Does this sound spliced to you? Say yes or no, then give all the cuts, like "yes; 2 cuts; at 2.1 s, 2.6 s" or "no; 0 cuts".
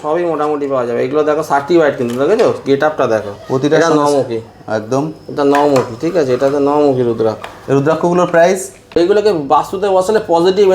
yes; 1 cut; at 8.9 s